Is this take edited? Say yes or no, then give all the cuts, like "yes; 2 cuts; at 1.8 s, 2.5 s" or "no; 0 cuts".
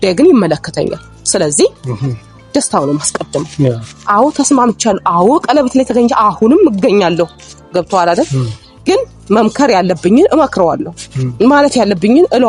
no; 0 cuts